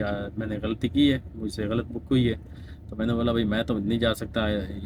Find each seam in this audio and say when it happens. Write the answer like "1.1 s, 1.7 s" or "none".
none